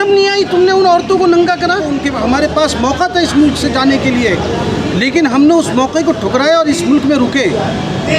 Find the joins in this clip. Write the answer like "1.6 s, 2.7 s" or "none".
1.9 s